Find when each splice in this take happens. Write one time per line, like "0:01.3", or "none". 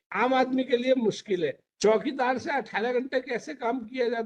0:01.6